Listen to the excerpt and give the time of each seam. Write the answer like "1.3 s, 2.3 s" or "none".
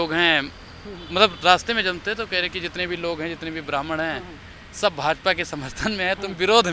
none